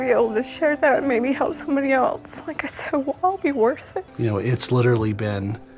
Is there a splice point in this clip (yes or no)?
yes